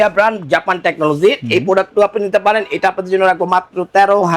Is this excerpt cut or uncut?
uncut